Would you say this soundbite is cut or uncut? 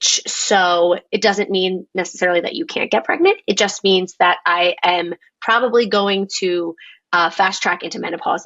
uncut